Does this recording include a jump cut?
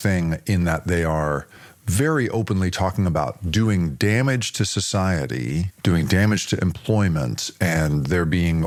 no; 0 cuts

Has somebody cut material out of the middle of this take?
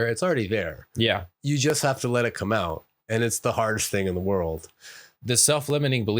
no; 0 cuts

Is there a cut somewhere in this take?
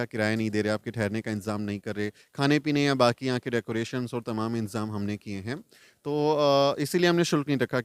no; 0 cuts

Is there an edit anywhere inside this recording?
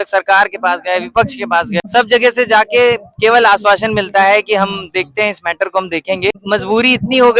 yes; 2 cuts; at 1.9 s, 6.4 s

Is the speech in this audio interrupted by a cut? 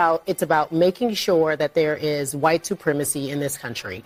no; 0 cuts

